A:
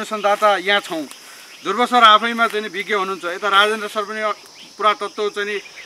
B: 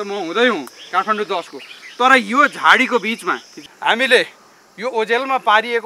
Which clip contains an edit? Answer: B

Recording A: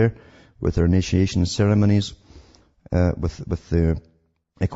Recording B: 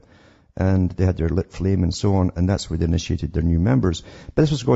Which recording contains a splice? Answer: B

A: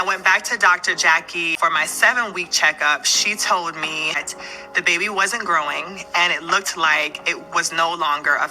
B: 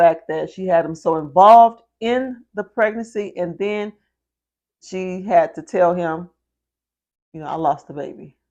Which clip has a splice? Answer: A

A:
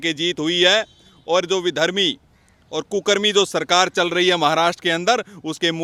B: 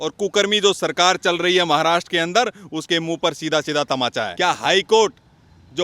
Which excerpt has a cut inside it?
B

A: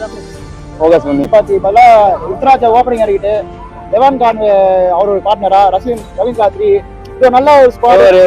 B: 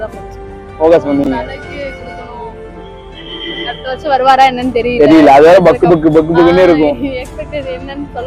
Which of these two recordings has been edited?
A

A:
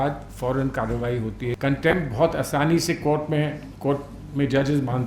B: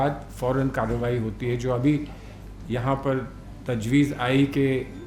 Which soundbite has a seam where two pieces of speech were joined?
A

